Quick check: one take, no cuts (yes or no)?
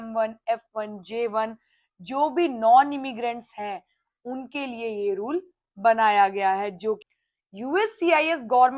no